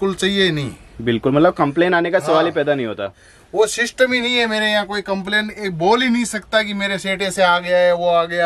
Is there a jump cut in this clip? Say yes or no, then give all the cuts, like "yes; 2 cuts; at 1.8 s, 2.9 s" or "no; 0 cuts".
no; 0 cuts